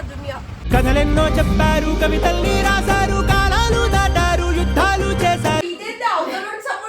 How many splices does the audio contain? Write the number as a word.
one